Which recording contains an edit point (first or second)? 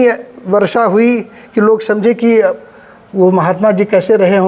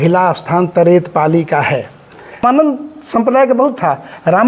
second